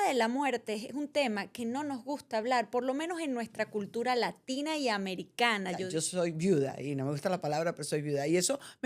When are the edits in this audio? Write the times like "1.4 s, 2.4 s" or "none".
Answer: 5.8 s

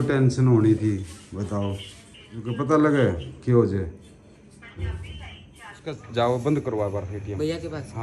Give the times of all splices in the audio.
2.5 s, 5.9 s

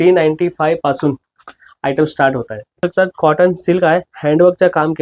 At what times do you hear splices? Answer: 2.8 s

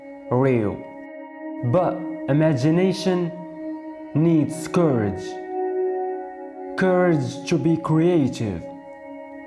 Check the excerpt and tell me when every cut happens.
none

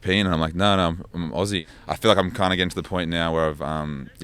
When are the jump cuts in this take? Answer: 1.6 s

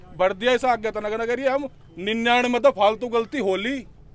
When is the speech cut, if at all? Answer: 1.8 s

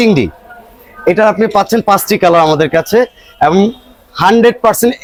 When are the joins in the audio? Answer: none

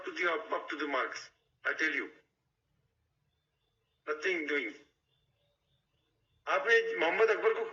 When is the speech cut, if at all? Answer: none

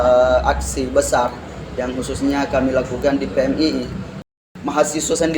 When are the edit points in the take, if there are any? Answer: 4.2 s

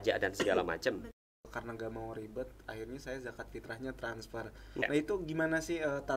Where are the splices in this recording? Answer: 1.2 s, 4.8 s

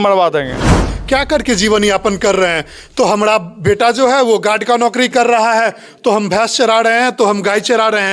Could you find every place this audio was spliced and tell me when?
0.9 s

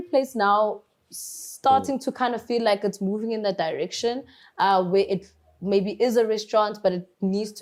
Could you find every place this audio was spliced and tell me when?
none

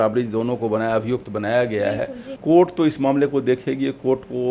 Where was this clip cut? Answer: 2.3 s

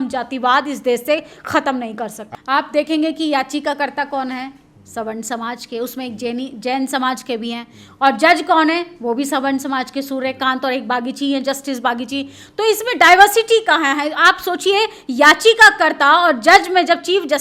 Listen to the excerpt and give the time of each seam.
2.2 s

